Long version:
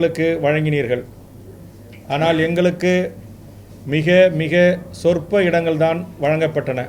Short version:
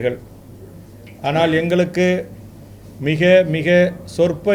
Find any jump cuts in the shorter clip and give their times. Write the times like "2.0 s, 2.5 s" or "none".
none